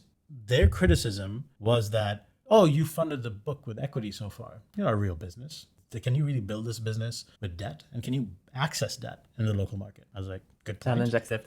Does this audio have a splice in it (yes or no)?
no